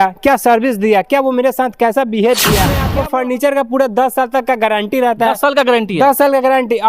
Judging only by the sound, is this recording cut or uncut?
cut